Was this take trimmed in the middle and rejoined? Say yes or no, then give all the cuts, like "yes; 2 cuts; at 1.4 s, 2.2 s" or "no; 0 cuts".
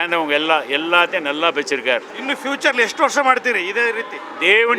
yes; 1 cut; at 2.1 s